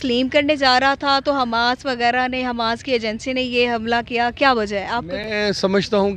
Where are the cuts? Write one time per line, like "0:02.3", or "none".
none